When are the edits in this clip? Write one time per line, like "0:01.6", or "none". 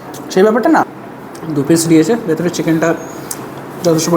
0:01.0